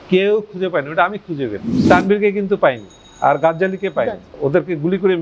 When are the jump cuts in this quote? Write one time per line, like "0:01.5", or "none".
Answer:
0:01.8
0:04.2